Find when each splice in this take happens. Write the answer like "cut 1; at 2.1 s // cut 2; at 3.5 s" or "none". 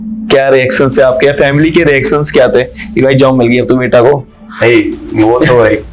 none